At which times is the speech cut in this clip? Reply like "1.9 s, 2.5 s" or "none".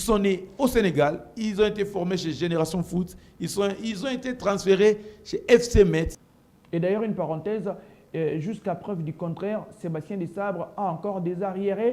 6.2 s